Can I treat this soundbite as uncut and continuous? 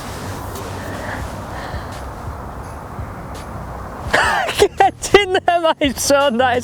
yes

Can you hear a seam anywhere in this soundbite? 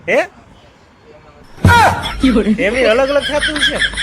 yes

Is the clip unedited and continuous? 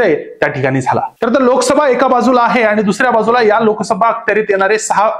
yes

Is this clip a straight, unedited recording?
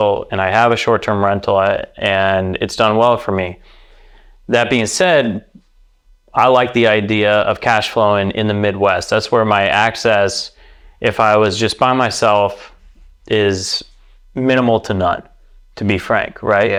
yes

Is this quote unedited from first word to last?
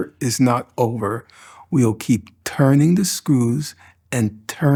yes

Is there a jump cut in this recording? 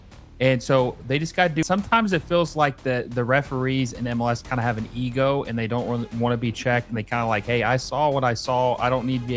yes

